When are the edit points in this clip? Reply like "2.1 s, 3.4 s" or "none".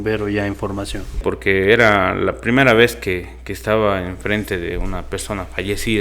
1.2 s